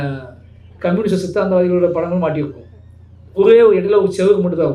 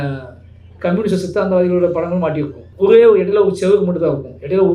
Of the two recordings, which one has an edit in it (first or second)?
second